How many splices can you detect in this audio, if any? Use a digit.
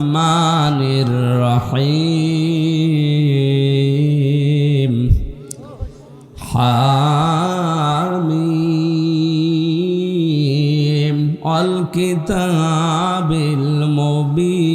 0